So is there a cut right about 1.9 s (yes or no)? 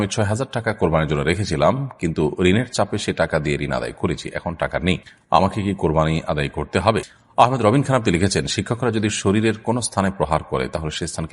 no